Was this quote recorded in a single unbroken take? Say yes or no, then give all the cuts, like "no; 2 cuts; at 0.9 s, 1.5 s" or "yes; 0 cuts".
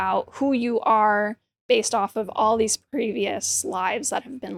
yes; 0 cuts